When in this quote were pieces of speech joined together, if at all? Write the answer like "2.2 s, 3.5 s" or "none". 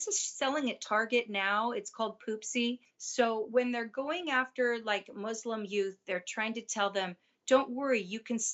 2.9 s